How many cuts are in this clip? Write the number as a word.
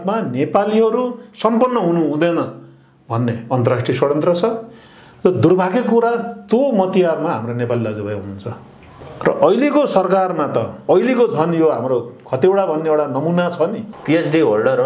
one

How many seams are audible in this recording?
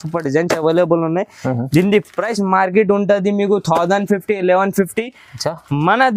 zero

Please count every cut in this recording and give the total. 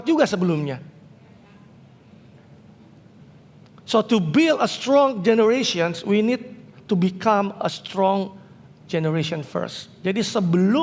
zero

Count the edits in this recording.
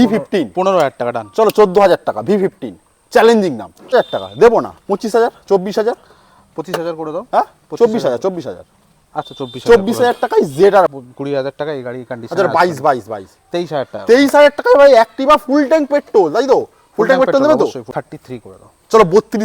three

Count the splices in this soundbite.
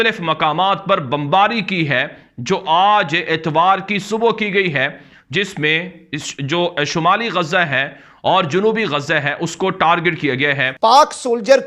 one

